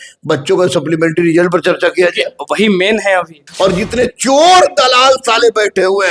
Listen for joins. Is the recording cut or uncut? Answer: cut